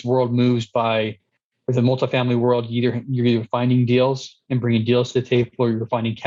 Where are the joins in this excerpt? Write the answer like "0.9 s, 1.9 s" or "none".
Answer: none